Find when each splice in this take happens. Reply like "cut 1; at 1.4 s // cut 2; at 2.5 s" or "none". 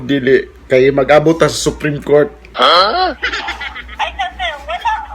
none